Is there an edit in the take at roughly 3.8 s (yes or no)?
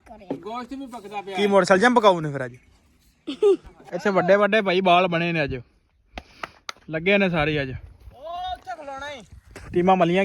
yes